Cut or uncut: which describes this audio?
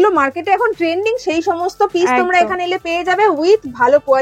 uncut